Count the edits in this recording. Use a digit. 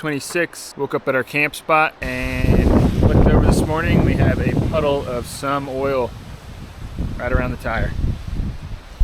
1